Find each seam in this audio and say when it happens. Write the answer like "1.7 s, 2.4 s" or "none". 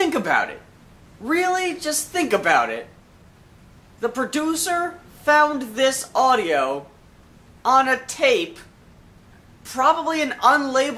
none